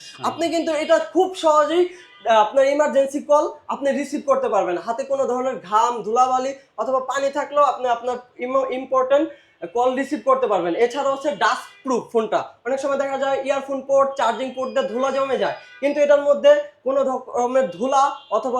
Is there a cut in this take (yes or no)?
no